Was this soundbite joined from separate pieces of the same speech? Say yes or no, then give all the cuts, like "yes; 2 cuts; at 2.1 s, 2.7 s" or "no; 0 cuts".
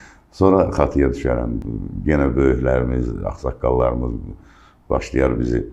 no; 0 cuts